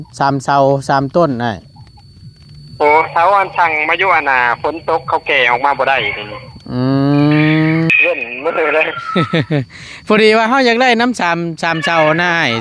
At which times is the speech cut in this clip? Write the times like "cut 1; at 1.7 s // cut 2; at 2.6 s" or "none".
cut 1; at 7.9 s